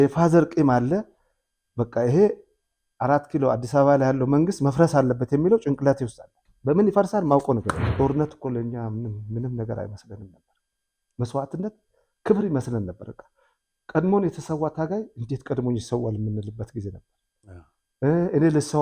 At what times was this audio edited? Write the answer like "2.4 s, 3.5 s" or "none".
7.9 s